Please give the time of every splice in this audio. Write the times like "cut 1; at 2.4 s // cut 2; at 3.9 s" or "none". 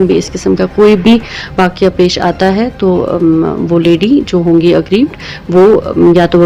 none